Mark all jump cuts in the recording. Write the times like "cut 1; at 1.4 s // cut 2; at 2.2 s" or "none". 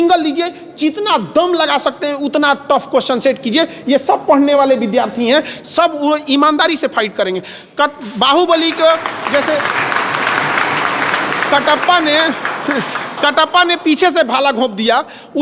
none